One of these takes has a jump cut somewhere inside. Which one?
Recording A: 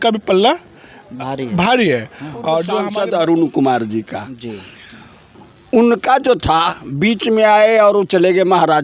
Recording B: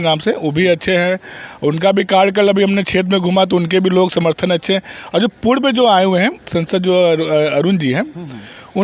A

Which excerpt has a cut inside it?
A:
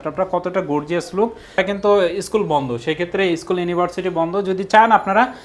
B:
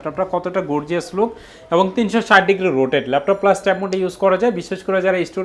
A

